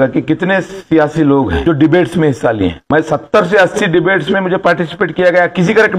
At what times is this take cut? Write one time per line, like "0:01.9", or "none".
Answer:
0:01.6
0:02.8